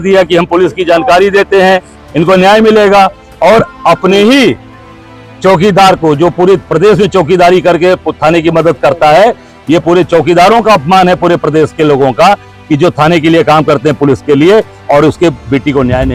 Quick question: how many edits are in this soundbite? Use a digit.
0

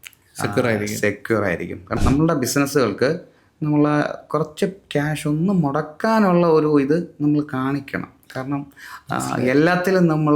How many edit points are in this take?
1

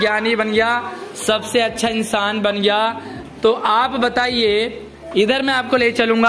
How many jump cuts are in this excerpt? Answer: 0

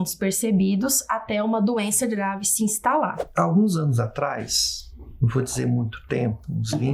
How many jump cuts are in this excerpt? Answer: 1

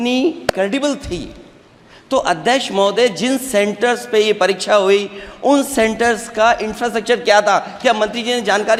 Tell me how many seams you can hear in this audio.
0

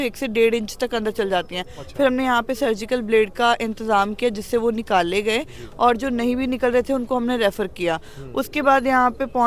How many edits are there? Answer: 0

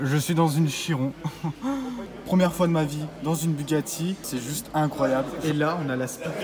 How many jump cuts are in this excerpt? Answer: 3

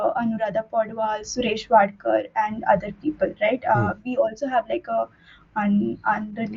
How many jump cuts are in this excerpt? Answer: 0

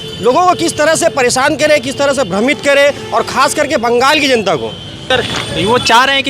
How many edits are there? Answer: 1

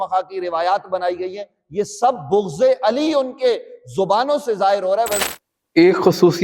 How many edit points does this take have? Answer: 1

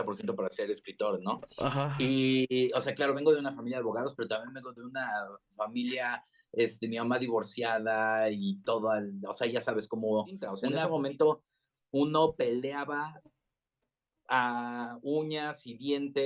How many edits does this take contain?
1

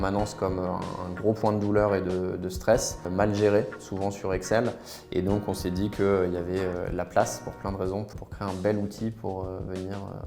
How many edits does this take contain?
2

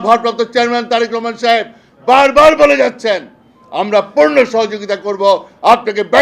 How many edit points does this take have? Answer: 0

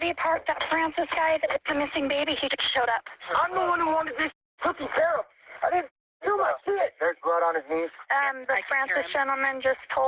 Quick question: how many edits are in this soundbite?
2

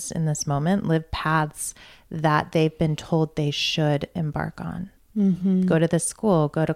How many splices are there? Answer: 1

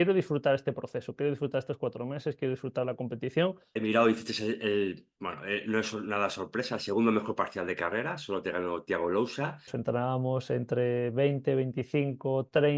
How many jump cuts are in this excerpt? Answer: 2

